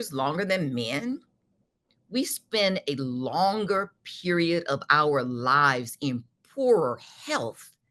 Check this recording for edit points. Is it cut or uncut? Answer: uncut